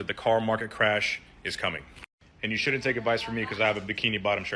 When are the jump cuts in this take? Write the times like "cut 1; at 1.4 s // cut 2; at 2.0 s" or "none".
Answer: none